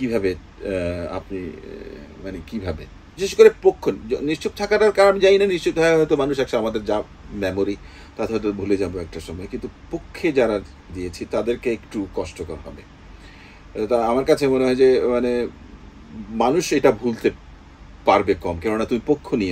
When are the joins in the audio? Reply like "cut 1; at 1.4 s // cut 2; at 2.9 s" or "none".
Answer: cut 1; at 3.1 s